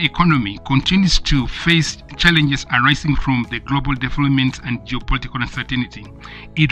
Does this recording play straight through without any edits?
yes; 0 cuts

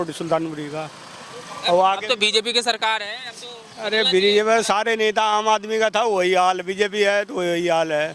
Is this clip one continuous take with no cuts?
yes; 0 cuts

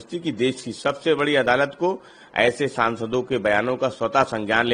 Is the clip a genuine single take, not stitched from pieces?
yes; 0 cuts

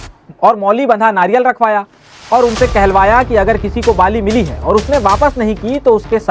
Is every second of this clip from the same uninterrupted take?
yes; 0 cuts

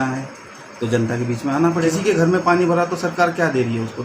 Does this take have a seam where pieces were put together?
yes; 1 cut; at 2.0 s

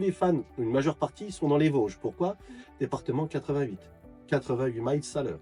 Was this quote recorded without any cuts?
yes; 0 cuts

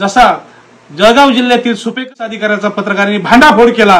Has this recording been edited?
yes; 1 cut; at 2.0 s

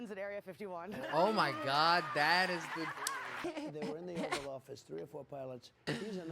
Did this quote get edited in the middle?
yes; 1 cut; at 3.4 s

